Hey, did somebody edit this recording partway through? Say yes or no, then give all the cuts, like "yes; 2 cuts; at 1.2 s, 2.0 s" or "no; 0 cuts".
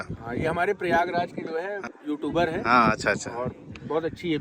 yes; 1 cut; at 1.8 s